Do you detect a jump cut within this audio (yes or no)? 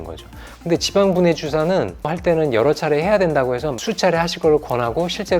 yes